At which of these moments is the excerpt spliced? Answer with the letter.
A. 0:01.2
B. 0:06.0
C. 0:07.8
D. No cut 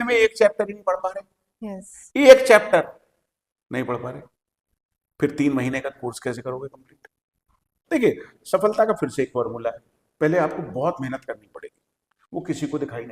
C